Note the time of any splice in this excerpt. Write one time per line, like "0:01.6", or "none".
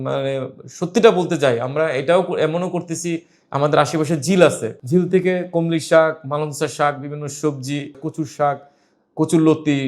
0:04.7
0:08.0